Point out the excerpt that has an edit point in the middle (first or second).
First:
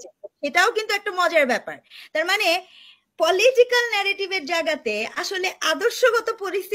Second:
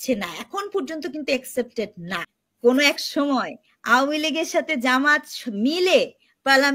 second